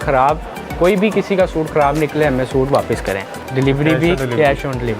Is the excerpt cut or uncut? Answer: cut